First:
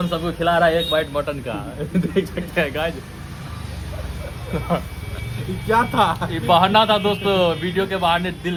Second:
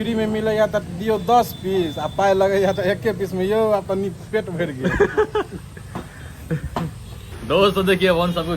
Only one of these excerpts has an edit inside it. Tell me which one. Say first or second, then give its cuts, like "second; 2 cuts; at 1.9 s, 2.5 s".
second; 1 cut; at 7.3 s